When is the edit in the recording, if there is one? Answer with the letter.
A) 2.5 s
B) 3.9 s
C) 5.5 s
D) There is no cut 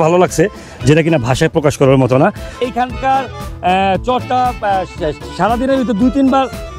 A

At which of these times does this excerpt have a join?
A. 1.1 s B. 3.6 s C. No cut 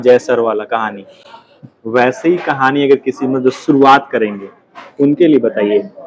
C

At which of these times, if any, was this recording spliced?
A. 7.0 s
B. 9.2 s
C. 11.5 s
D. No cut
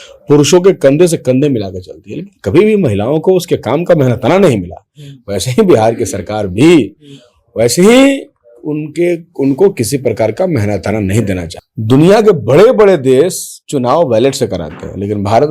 C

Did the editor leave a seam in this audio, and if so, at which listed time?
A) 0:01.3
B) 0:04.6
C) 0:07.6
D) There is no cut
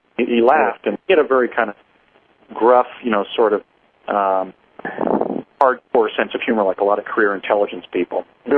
A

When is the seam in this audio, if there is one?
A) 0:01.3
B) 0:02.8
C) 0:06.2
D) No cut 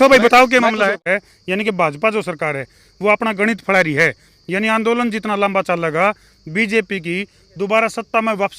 A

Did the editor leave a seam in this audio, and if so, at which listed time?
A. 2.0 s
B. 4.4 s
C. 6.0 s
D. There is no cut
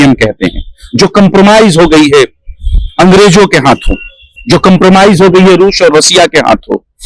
D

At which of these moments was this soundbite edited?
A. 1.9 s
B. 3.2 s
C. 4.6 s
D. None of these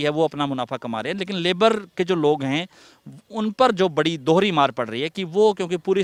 D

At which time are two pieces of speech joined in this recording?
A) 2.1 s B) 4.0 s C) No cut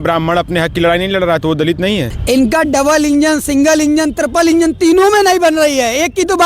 A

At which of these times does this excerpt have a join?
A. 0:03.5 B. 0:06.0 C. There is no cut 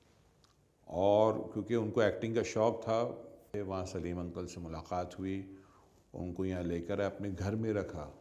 A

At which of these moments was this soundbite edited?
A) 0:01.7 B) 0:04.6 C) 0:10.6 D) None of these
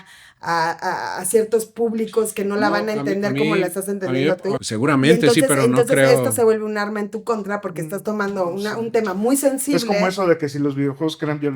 B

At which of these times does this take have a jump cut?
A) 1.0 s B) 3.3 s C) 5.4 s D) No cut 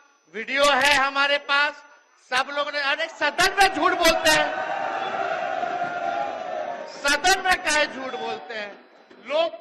D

